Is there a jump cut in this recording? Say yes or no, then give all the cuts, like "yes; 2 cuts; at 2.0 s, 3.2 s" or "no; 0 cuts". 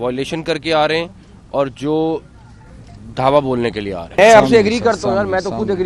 yes; 1 cut; at 4.2 s